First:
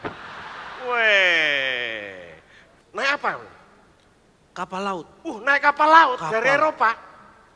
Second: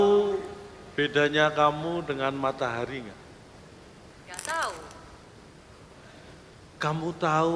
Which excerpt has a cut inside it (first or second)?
first